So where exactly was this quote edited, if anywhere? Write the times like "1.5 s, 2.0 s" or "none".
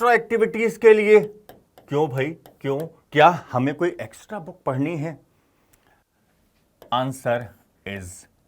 3.0 s